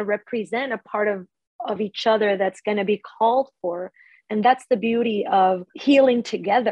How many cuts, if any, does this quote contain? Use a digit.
1